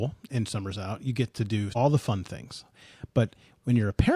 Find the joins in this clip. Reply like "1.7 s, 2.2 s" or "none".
1.7 s